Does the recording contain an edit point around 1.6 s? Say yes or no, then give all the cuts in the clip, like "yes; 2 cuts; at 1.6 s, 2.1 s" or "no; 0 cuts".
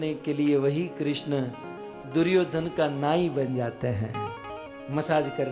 no; 0 cuts